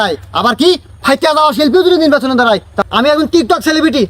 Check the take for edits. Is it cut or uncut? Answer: cut